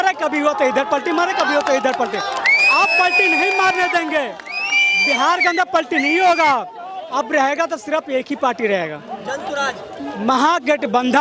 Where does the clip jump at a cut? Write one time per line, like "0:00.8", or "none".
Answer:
none